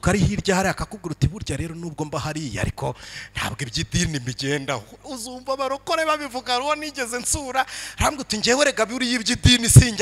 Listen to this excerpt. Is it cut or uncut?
uncut